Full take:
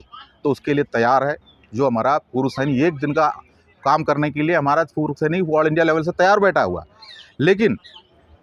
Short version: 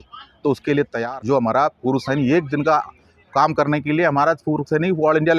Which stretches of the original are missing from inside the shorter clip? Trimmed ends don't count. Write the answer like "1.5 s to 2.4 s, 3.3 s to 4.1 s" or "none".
1.0 s to 1.5 s